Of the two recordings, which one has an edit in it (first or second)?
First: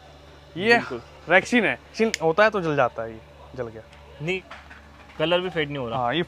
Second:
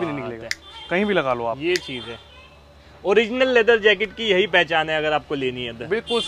first